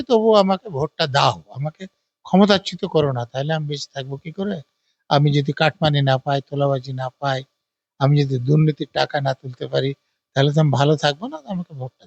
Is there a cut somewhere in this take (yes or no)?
no